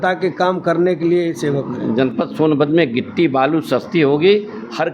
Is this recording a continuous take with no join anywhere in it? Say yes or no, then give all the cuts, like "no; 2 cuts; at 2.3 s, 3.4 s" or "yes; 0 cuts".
no; 1 cut; at 1.7 s